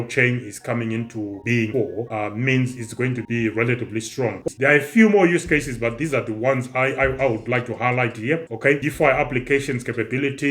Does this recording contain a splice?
yes; 1 cut; at 4.4 s

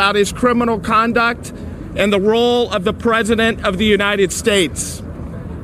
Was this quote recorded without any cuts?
yes; 0 cuts

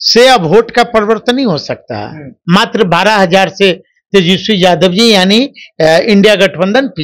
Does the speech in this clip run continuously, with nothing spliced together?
no; 1 cut; at 2.3 s

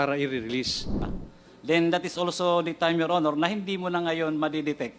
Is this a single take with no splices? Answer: no; 1 cut; at 0.9 s

